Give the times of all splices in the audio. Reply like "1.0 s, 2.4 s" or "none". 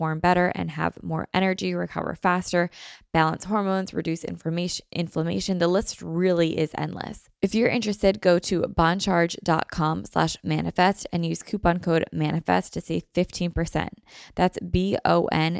7.2 s